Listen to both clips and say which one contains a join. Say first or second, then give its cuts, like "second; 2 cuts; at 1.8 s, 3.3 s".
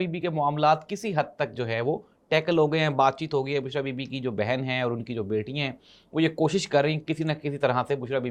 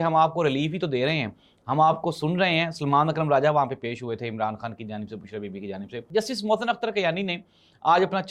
second; 1 cut; at 5.9 s